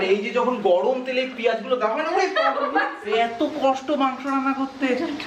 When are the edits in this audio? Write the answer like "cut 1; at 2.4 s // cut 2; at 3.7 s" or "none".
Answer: cut 1; at 3.0 s